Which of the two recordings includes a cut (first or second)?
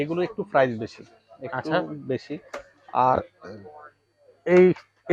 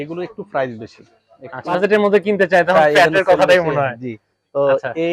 second